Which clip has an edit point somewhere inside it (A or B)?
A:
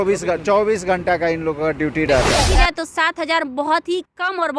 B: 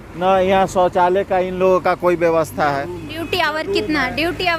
A